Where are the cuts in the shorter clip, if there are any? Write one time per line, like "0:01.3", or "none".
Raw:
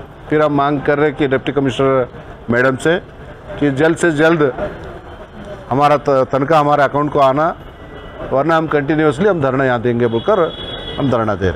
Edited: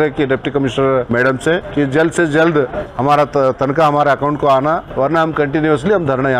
0:01.3
0:02.8
0:04.9